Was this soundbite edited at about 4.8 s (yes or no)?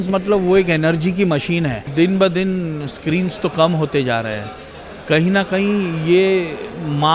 no